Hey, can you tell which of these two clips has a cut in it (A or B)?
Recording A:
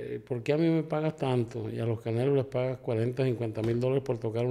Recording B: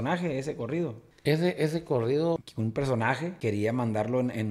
B